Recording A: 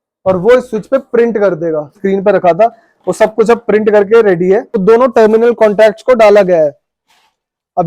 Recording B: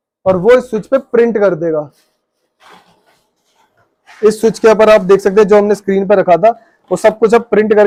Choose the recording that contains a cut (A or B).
A